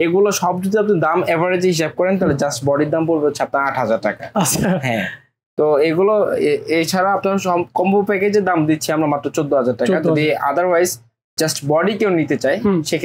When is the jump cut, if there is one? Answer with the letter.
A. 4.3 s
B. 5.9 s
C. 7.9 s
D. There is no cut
D